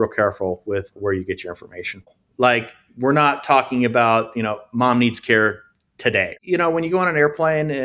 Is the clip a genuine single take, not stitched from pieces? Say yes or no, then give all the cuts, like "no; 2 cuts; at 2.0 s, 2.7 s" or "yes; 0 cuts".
no; 3 cuts; at 1.0 s, 2.0 s, 6.3 s